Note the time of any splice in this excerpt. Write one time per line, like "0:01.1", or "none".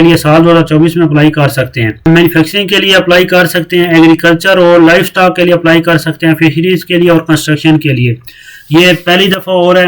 0:02.1